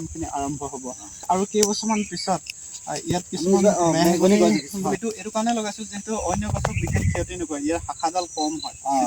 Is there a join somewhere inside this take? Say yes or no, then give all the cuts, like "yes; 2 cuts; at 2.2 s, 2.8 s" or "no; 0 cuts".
yes; 2 cuts; at 1.2 s, 4.9 s